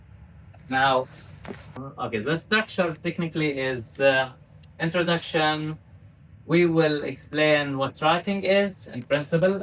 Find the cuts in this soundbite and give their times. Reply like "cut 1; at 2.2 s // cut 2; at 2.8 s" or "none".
cut 1; at 1.8 s